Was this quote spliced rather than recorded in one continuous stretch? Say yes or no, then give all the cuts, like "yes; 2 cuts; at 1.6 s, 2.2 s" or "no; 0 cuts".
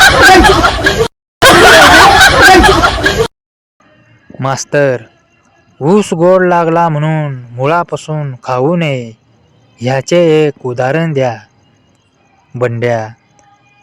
no; 0 cuts